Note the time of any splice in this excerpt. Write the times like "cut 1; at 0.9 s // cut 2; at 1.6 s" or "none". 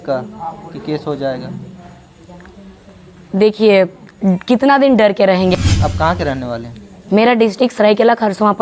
cut 1; at 5.5 s